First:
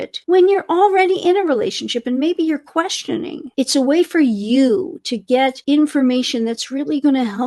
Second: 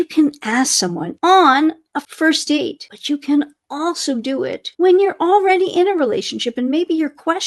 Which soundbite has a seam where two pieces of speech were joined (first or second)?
second